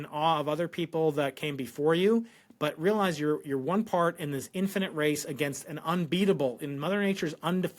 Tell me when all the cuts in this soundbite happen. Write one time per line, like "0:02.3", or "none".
none